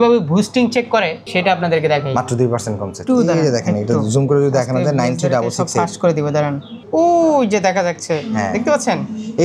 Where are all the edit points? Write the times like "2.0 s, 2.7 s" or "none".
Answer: 1.2 s, 3.0 s, 6.7 s